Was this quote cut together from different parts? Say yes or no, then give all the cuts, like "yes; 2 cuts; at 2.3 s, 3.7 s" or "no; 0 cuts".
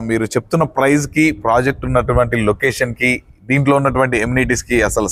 no; 0 cuts